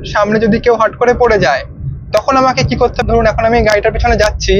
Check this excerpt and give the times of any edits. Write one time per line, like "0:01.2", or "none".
0:03.0